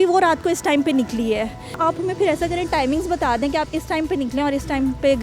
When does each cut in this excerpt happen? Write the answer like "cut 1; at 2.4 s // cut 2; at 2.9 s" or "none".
cut 1; at 1.8 s